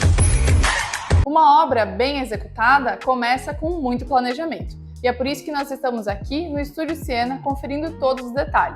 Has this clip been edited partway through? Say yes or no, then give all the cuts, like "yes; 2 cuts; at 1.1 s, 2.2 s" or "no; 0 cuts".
yes; 1 cut; at 1.2 s